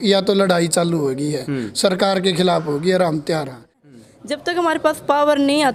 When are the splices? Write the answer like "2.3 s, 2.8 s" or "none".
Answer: 3.8 s